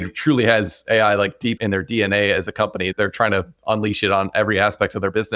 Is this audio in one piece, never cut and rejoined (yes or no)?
no